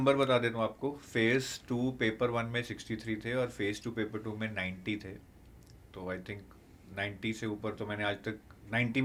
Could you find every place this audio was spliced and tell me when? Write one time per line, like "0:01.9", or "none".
none